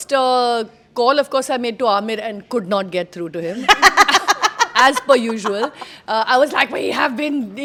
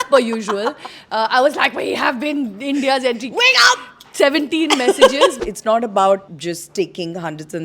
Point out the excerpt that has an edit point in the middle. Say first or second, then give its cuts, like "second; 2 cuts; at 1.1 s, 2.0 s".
second; 2 cuts; at 5.4 s, 6.3 s